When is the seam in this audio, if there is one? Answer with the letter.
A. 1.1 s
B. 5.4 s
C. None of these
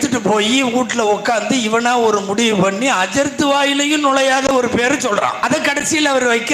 B